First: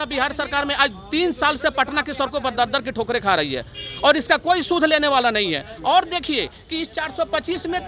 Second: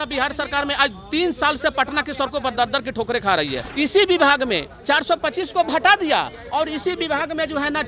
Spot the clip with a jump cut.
second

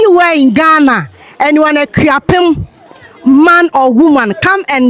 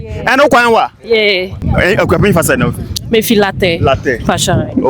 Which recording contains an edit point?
second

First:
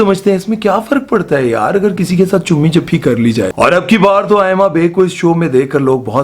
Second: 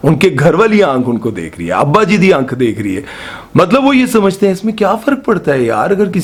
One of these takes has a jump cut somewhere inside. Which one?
first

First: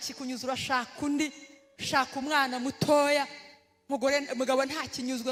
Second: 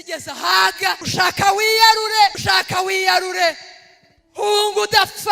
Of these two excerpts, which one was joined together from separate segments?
second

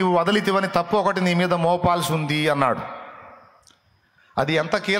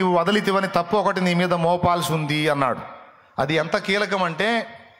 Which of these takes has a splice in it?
second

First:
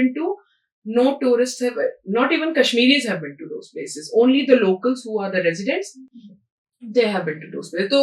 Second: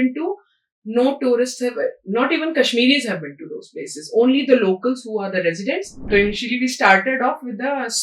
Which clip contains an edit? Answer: second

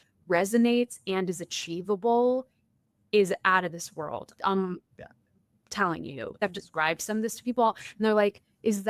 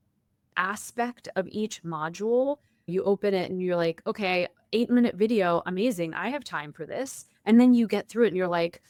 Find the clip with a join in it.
first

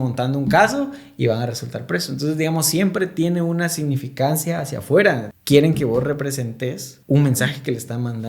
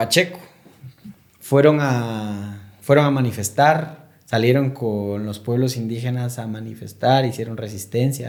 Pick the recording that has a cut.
first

